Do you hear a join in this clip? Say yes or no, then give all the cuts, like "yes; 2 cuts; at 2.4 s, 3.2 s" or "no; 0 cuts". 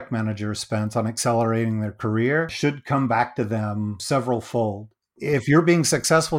yes; 3 cuts; at 2.5 s, 4.0 s, 5.1 s